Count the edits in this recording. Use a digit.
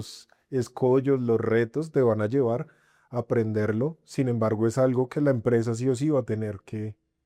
0